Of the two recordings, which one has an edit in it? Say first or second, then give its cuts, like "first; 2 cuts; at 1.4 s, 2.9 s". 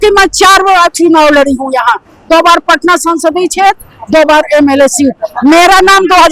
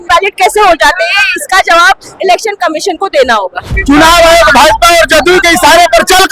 second; 1 cut; at 3.7 s